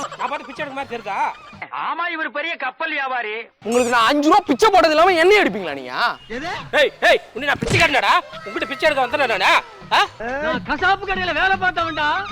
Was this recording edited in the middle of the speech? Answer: yes; 3 cuts; at 3.5 s, 6.2 s, 10.2 s

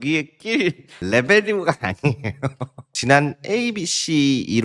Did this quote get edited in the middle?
yes; 1 cut; at 2.8 s

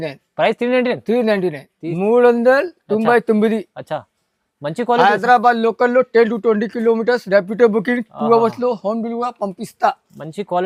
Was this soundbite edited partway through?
no; 0 cuts

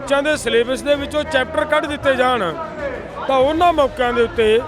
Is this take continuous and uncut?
yes; 0 cuts

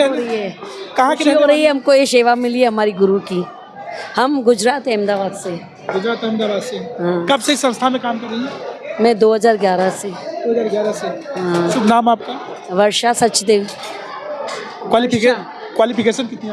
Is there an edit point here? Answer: no; 0 cuts

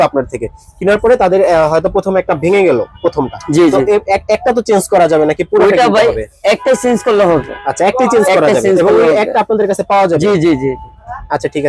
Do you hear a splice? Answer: no; 0 cuts

